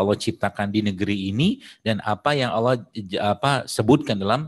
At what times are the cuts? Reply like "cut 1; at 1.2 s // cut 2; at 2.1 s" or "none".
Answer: none